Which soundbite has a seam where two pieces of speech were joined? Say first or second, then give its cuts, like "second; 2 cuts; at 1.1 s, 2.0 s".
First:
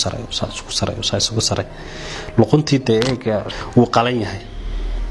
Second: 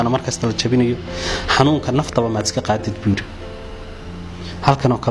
first; 1 cut; at 3.5 s